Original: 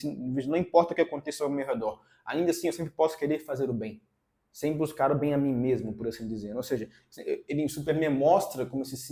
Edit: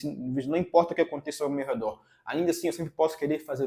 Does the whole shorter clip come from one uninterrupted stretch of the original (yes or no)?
yes